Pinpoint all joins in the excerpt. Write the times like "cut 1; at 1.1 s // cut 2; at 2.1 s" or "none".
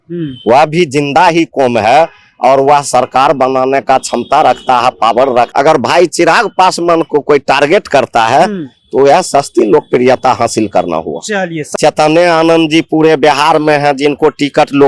cut 1; at 5.5 s // cut 2; at 11.6 s

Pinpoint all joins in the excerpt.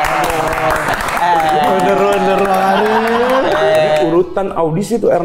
cut 1; at 4.0 s

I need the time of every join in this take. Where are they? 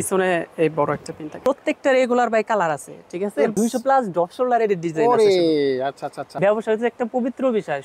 cut 1; at 1.4 s // cut 2; at 3.6 s // cut 3; at 6.3 s

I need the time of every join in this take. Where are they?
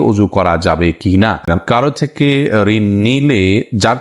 cut 1; at 1.5 s

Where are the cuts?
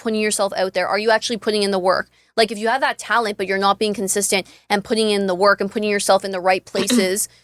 none

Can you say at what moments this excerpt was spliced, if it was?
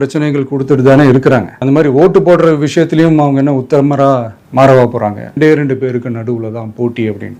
cut 1; at 1.5 s // cut 2; at 5.2 s

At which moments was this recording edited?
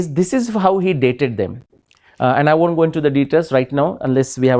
none

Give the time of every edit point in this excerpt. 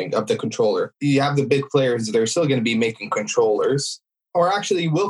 cut 1; at 0.9 s

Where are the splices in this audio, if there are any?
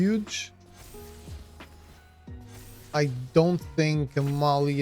cut 1; at 1.1 s // cut 2; at 2.8 s

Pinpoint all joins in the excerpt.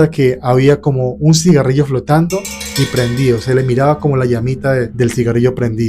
cut 1; at 4.9 s

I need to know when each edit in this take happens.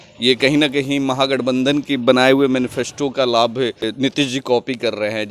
cut 1; at 3.9 s

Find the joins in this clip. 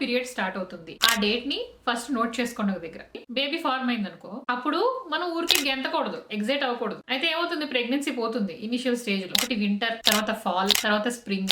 cut 1; at 3.1 s // cut 2; at 9.3 s

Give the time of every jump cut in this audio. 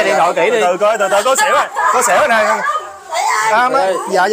none

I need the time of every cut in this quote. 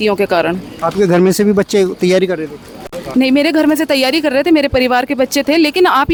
none

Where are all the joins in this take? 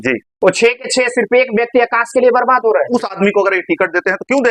cut 1; at 2.9 s

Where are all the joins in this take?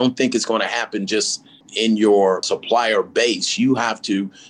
cut 1; at 1.7 s // cut 2; at 2.5 s

